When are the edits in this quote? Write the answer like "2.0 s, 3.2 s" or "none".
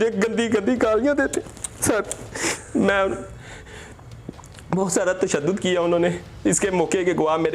none